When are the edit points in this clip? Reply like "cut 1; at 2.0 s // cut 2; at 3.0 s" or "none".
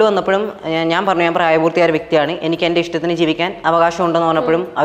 none